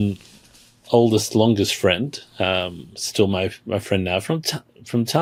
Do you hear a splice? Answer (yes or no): no